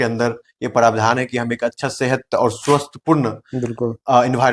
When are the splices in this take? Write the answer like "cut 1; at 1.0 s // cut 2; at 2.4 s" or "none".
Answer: none